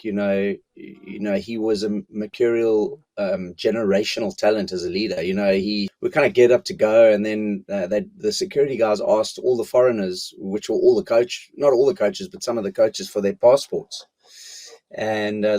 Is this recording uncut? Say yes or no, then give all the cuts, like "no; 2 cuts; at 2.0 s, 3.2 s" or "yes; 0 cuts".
no; 1 cut; at 5.9 s